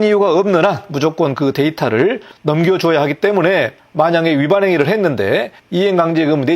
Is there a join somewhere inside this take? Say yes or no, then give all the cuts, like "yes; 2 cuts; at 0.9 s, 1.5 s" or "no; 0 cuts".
no; 0 cuts